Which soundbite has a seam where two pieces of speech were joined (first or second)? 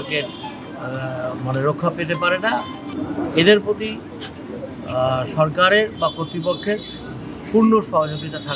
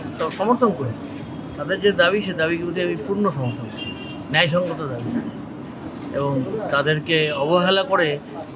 first